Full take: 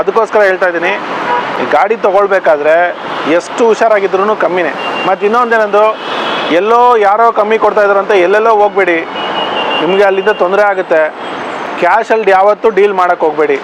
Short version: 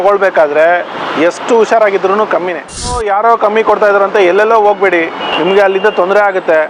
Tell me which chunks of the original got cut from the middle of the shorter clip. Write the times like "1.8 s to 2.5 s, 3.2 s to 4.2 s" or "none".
5.0 s to 6.9 s, 9.2 s to 9.7 s